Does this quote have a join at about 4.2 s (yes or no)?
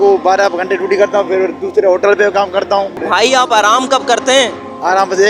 no